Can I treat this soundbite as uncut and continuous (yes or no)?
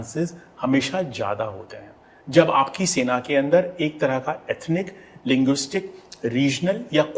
yes